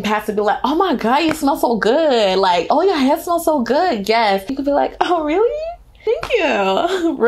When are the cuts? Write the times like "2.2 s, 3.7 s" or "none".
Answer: 2.7 s